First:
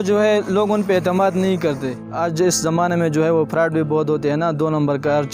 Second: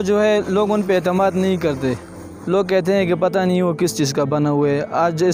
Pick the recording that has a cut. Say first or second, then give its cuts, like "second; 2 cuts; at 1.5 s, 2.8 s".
first; 1 cut; at 2.3 s